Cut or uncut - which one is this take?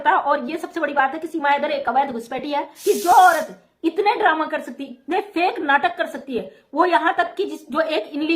cut